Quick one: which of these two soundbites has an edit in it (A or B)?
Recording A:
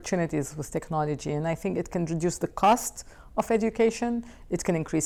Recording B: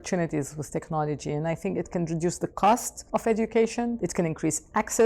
B